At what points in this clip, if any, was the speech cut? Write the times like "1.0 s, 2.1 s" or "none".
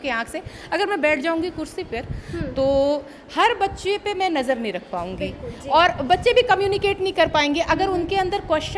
none